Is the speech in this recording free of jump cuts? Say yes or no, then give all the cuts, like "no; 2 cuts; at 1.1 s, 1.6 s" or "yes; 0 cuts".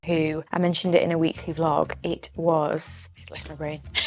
yes; 0 cuts